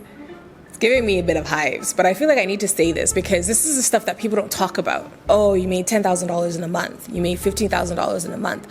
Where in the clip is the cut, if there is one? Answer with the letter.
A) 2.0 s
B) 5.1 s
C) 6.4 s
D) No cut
B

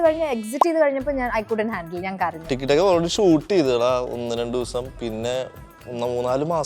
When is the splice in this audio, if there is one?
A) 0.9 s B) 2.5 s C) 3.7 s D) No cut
B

